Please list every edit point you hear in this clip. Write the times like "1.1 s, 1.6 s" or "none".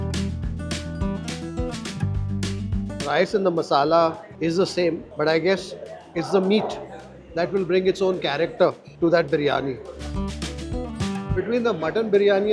11.3 s

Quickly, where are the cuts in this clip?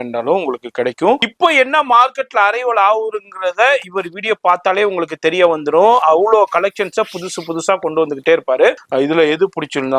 1.3 s, 8.8 s

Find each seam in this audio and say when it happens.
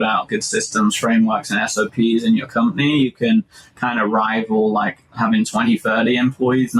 none

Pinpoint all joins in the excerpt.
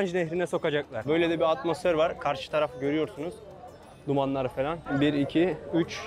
1.0 s, 4.8 s

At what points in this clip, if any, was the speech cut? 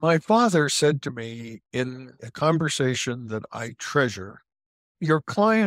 4.8 s

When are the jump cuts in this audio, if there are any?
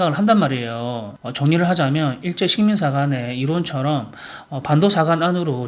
none

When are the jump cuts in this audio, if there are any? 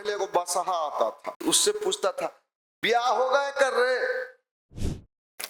1.3 s

